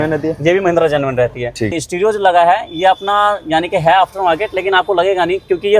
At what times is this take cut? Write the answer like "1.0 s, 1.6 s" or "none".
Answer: 1.7 s